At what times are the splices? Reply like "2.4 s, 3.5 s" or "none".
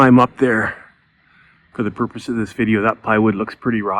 none